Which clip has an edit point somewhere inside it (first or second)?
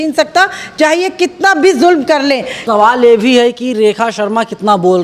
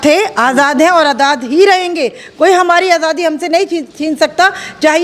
first